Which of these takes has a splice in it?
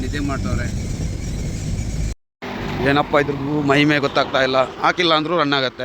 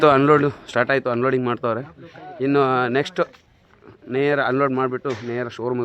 first; 1 cut; at 2.1 s

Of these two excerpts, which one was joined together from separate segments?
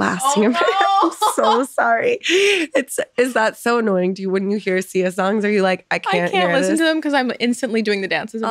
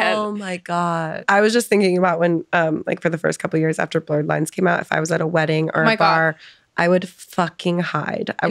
second; 1 cut; at 1.3 s

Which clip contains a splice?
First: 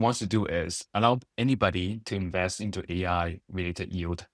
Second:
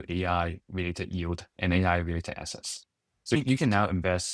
second; 1 cut; at 3.4 s

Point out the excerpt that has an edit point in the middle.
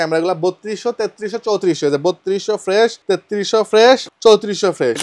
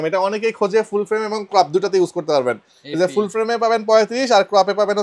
first; 2 cuts; at 3.0 s, 4.1 s

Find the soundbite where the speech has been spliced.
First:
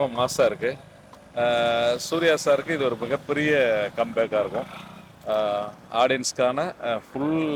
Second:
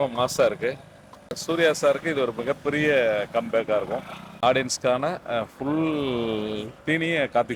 second; 2 cuts; at 1.3 s, 4.2 s

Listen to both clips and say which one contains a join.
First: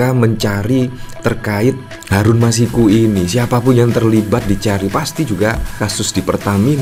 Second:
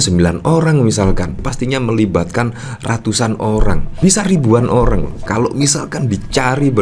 second; 3 cuts; at 1.4 s, 3.9 s, 5.2 s

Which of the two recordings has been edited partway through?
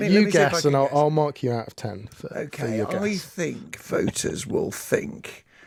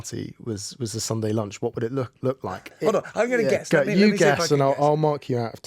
second; 1 cut; at 2.7 s

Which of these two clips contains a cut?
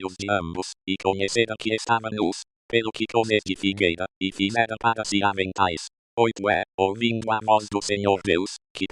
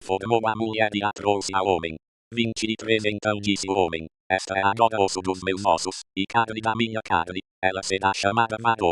first; 1 cut; at 3.5 s

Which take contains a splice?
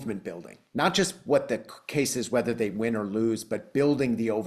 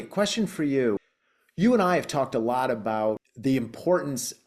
second; 2 cuts; at 1.1 s, 3.3 s

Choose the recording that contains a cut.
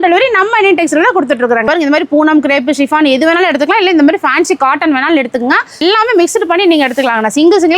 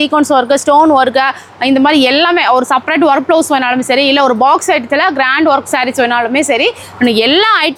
first; 2 cuts; at 1.7 s, 5.8 s

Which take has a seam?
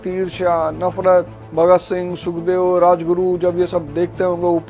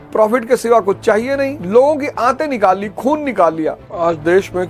second; 2 cuts; at 1.6 s, 3.9 s

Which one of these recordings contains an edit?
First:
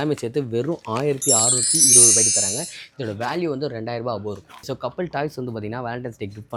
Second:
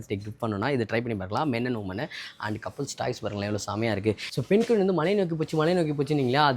second; 1 cut; at 4.3 s

